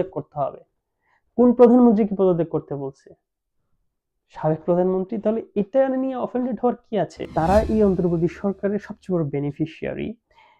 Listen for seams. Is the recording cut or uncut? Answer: cut